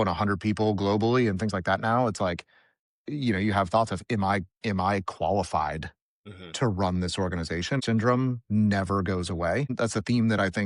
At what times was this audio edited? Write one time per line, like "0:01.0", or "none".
0:07.8
0:09.7